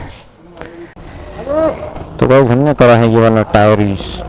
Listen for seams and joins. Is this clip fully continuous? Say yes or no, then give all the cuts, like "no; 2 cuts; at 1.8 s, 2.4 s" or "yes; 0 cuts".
no; 1 cut; at 0.9 s